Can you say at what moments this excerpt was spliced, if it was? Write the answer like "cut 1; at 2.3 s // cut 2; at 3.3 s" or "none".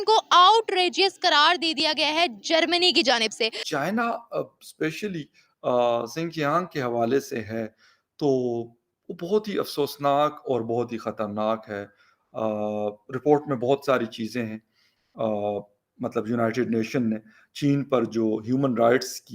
cut 1; at 3.6 s

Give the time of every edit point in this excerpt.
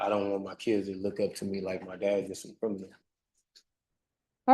cut 1; at 3.1 s

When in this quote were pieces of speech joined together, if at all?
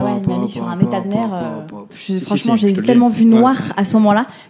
cut 1; at 2.0 s

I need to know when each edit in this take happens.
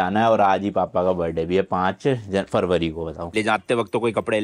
cut 1; at 3.2 s

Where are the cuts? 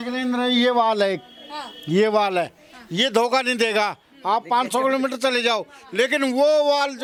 none

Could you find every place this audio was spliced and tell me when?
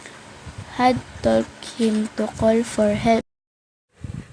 none

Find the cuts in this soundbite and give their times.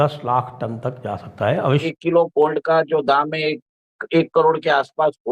cut 1; at 1.8 s

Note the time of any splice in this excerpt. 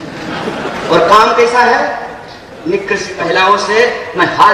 cut 1; at 3.1 s

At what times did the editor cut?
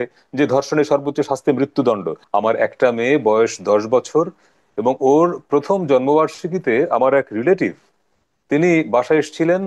cut 1; at 2.1 s

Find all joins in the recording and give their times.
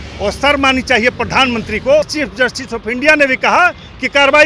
cut 1; at 2.2 s

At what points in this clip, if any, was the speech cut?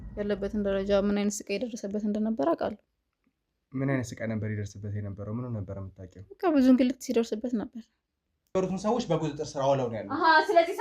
cut 1; at 8.5 s

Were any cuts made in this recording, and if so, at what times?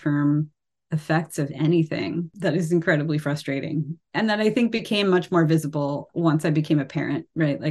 cut 1; at 2.3 s // cut 2; at 4.0 s // cut 3; at 6.0 s

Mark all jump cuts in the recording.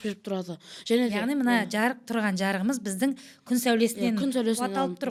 none

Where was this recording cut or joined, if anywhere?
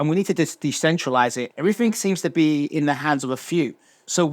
cut 1; at 1.5 s

